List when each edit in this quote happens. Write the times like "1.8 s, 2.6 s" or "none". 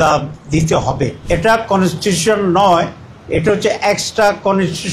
1.2 s